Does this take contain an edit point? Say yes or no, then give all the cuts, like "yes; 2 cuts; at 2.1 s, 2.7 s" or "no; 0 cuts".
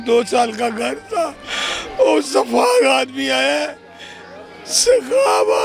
no; 0 cuts